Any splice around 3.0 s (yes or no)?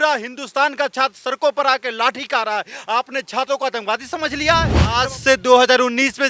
no